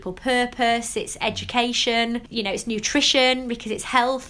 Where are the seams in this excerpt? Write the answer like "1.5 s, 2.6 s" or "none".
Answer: 2.3 s